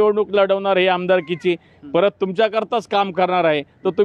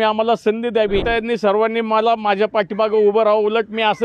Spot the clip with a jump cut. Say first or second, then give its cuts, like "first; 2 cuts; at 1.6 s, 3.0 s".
second; 1 cut; at 1.0 s